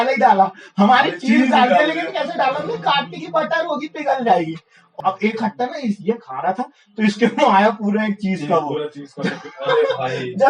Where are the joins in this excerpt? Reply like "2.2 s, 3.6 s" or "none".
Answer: 4.9 s